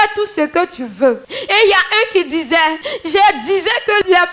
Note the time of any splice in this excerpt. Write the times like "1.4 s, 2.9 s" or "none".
1.3 s, 2.9 s